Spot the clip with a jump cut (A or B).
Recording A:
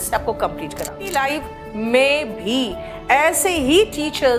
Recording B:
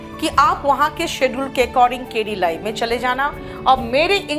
A